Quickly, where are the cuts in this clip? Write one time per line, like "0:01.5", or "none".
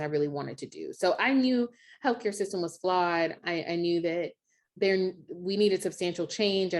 0:03.4
0:04.6